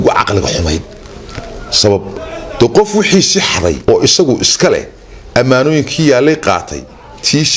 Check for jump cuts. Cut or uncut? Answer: cut